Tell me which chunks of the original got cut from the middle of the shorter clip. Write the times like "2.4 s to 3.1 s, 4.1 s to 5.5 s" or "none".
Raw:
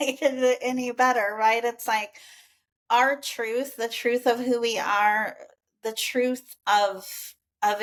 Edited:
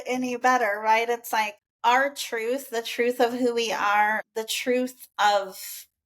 2.2 s to 2.7 s, 5.3 s to 5.7 s